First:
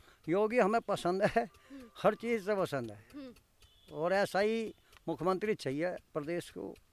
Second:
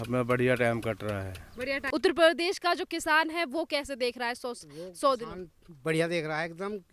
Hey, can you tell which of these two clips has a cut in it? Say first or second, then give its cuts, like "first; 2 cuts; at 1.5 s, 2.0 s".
second; 1 cut; at 1.8 s